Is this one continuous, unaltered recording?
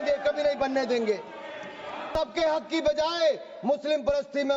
no; 1 cut; at 2.1 s

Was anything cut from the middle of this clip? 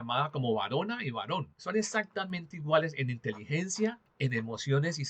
yes; 2 cuts; at 1.2 s, 4.1 s

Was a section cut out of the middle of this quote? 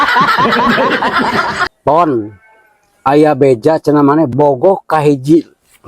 yes; 1 cut; at 1.7 s

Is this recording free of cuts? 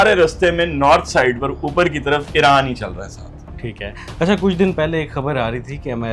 no; 1 cut; at 4.0 s

